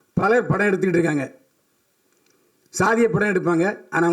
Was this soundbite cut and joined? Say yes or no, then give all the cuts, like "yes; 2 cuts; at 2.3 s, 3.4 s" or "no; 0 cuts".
no; 0 cuts